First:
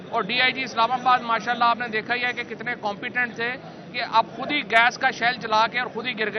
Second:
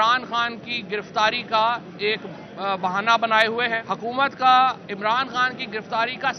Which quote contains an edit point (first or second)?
second